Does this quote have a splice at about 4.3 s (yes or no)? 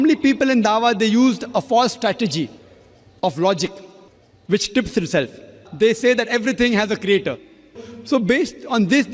no